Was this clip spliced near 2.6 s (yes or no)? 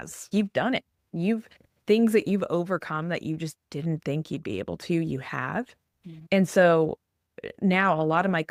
no